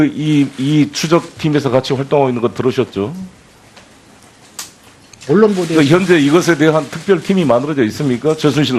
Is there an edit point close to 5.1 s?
no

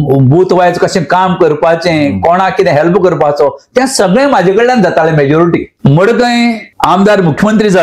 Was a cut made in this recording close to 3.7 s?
no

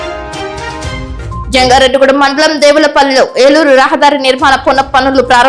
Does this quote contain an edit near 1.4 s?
yes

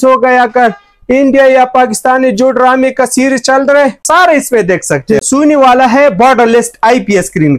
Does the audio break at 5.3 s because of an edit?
yes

